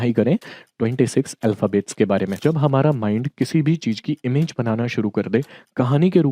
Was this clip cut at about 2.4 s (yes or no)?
yes